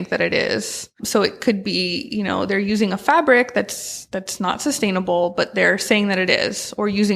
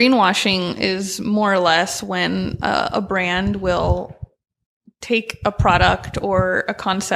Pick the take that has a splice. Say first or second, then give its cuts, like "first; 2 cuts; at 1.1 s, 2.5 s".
first; 1 cut; at 1.0 s